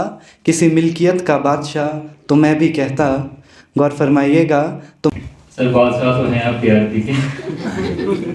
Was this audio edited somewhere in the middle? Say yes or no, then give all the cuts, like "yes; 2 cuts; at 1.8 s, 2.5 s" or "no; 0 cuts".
yes; 1 cut; at 5.1 s